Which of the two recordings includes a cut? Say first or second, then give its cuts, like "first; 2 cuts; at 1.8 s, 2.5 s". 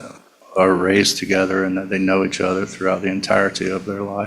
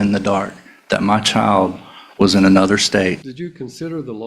second; 1 cut; at 3.2 s